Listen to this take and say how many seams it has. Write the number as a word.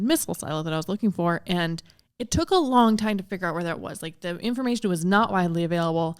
zero